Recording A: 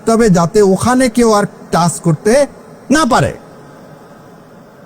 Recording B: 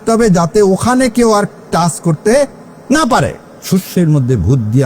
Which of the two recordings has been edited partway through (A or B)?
B